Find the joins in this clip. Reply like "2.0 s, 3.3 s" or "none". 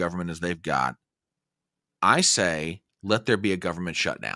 none

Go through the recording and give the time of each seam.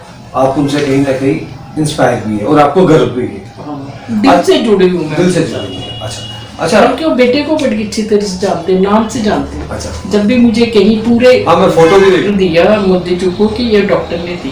12.3 s

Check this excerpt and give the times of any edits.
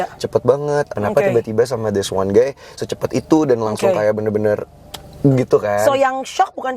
0.9 s

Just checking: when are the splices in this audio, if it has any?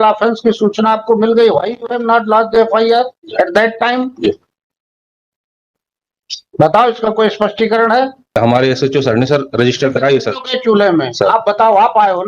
8.4 s

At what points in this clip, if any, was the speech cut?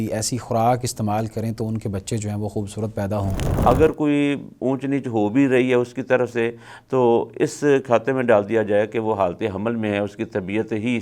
3.4 s

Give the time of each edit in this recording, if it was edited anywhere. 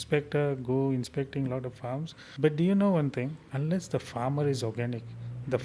2.2 s, 3.4 s

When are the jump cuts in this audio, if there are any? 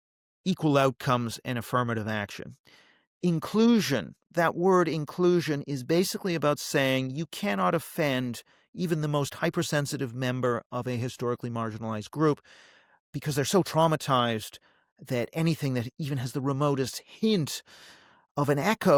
none

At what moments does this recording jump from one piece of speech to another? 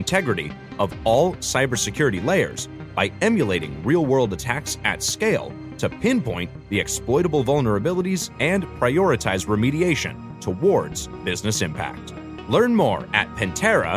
none

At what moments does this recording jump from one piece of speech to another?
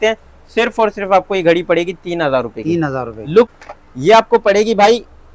3.5 s

